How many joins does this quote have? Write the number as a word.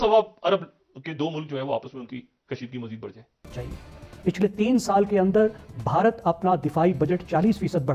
one